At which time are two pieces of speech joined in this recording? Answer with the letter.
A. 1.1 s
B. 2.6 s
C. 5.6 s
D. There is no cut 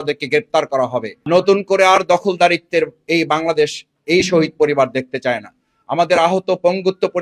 A